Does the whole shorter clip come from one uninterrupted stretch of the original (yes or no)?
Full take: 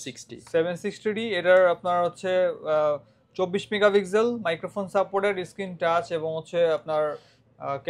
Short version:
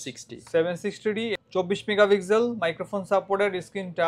no